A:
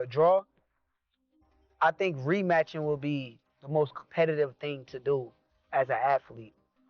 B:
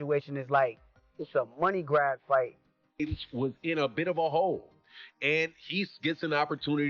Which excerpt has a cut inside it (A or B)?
B